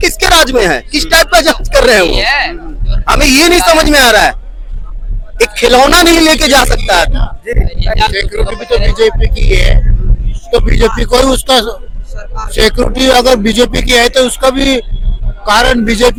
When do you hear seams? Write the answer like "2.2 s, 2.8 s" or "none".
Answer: none